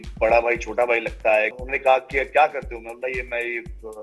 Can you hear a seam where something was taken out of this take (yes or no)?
yes